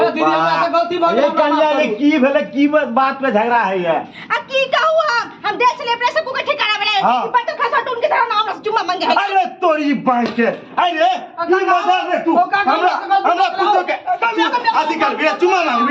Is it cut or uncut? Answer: uncut